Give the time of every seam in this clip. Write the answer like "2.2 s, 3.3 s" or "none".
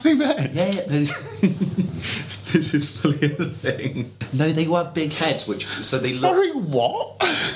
4.2 s